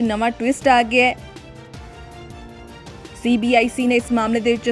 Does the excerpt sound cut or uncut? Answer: cut